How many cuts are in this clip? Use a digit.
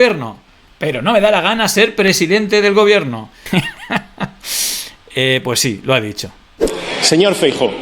1